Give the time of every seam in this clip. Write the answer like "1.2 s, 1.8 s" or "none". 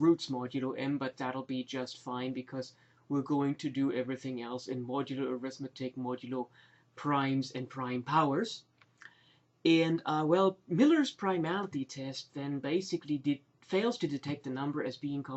2.8 s